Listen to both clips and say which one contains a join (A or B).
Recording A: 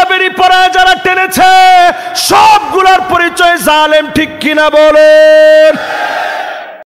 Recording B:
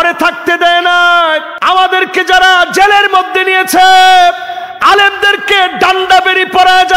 B